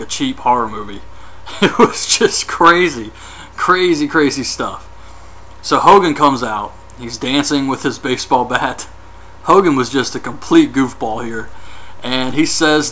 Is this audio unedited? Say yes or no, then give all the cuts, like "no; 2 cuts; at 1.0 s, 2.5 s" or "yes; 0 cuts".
no; 1 cut; at 7.7 s